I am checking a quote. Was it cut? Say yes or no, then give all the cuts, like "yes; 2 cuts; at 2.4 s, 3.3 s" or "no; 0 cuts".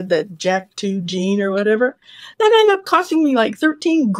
no; 0 cuts